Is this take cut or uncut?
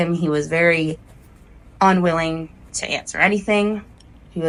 uncut